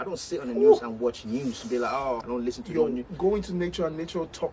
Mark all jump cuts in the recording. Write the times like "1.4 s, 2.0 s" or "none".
2.2 s

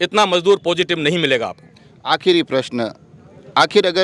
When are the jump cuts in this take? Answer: none

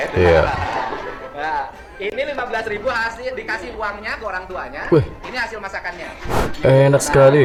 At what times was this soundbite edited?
none

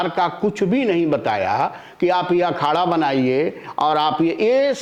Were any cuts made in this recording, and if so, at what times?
none

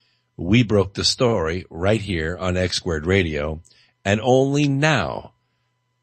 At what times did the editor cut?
2.5 s

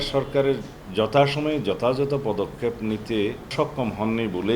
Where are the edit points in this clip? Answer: 3.5 s

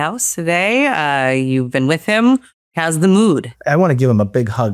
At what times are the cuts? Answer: 2.7 s, 3.5 s

